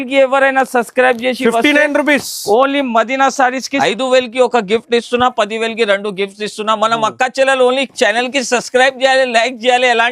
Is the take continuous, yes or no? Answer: no